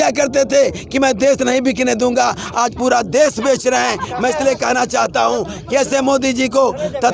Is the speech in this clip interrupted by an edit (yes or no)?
no